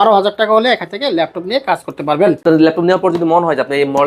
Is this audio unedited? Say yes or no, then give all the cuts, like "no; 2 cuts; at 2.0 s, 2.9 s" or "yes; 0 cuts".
no; 1 cut; at 2.4 s